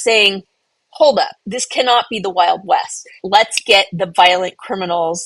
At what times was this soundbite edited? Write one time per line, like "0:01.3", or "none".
0:01.5
0:03.2